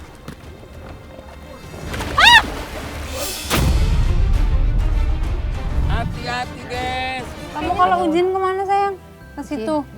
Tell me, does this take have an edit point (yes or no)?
yes